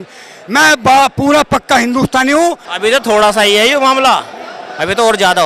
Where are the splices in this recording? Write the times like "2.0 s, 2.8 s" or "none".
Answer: 2.7 s